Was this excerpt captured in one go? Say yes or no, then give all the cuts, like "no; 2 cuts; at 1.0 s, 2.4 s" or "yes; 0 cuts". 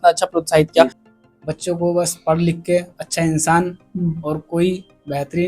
no; 1 cut; at 1.0 s